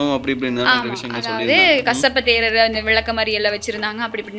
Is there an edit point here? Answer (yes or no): no